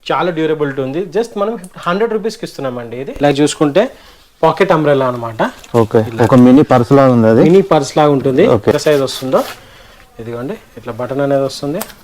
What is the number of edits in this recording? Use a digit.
2